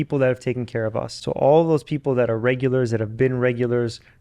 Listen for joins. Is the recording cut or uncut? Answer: cut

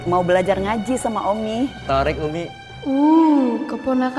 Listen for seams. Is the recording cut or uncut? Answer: cut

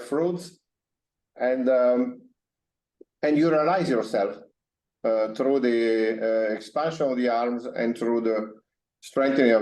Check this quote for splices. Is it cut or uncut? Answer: uncut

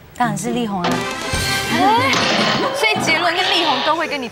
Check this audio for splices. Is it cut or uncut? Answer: uncut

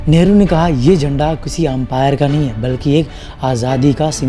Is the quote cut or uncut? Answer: uncut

